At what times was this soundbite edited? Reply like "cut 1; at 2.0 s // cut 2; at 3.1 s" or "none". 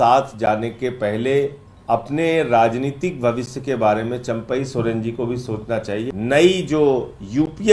cut 1; at 1.7 s // cut 2; at 6.1 s